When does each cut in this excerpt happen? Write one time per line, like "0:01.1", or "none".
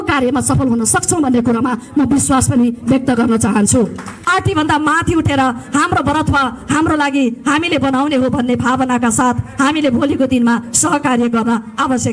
0:04.2